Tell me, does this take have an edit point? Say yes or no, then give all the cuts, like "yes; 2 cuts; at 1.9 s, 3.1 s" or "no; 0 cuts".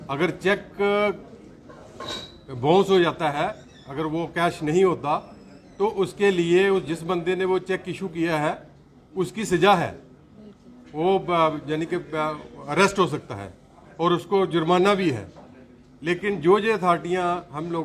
no; 0 cuts